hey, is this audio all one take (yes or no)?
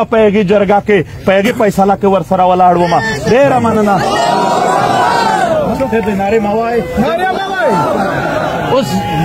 yes